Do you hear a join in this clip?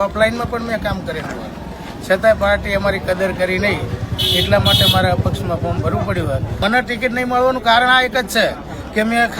yes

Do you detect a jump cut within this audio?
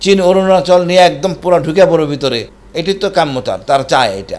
yes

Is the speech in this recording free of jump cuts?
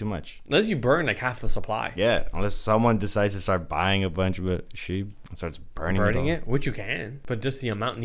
no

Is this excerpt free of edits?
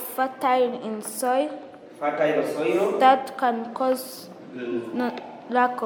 yes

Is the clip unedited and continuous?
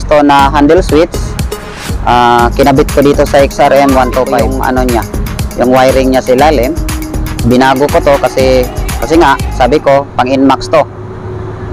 no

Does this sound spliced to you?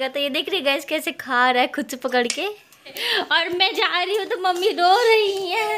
yes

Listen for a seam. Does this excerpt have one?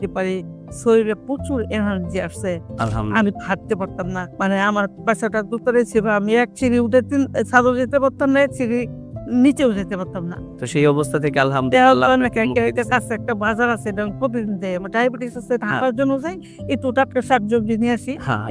yes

